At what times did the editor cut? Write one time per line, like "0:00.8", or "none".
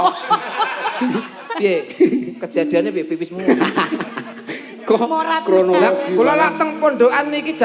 0:01.4